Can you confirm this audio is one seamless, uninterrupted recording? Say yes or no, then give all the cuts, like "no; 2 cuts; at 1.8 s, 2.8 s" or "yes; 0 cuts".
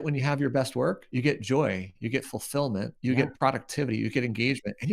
no; 3 cuts; at 1.0 s, 1.9 s, 2.9 s